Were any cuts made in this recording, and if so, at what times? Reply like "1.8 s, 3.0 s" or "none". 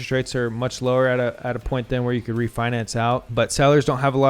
3.3 s